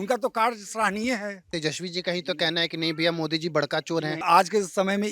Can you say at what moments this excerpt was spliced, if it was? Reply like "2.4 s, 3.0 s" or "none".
1.5 s, 4.2 s